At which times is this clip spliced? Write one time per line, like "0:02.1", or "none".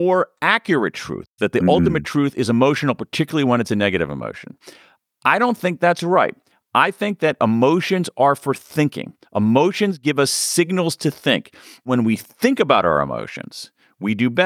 0:11.9